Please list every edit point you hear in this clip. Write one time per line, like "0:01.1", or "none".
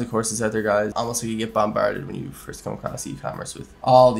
0:00.9